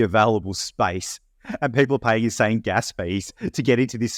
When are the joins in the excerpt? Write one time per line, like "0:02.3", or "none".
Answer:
none